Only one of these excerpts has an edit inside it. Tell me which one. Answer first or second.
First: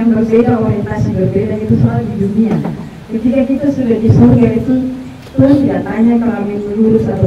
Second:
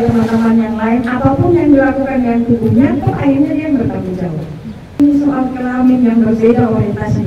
second